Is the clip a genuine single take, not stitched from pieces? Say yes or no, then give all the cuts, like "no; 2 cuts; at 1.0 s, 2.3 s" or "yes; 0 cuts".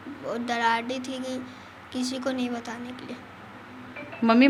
yes; 0 cuts